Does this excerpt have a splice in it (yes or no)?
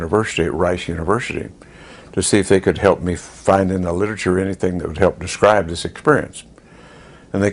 no